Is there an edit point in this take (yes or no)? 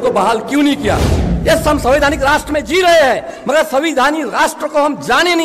yes